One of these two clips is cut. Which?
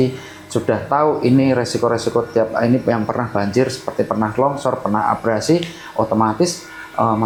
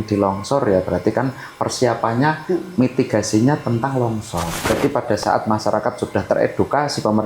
second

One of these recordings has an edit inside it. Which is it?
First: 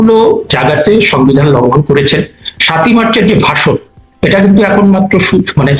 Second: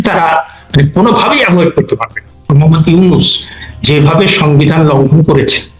second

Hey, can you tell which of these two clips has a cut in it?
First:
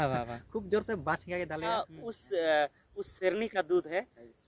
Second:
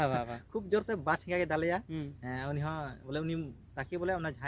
first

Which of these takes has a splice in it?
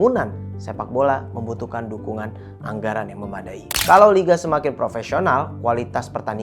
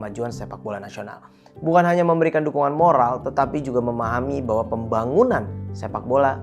first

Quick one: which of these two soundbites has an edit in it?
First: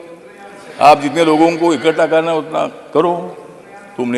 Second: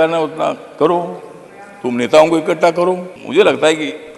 second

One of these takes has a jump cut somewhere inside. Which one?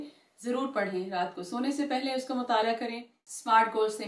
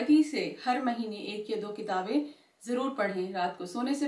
first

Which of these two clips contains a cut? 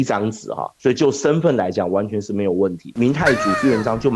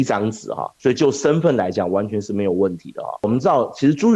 first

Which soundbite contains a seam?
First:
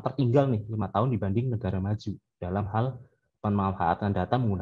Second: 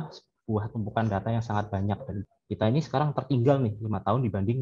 second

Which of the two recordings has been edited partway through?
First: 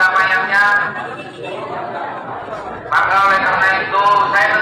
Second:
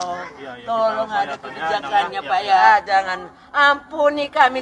second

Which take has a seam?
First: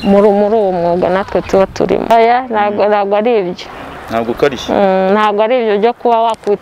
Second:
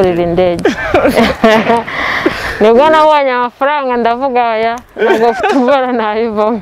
first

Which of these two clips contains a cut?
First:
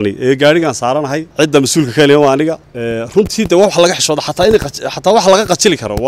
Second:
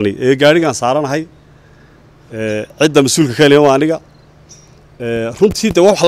first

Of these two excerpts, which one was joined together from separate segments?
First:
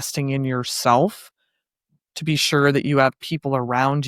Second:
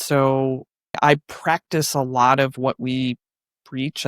second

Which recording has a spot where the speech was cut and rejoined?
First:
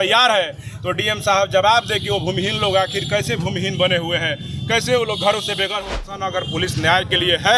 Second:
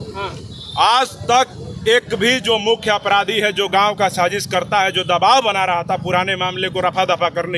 first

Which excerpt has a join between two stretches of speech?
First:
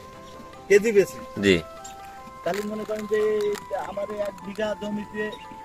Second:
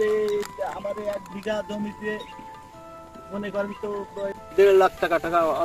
second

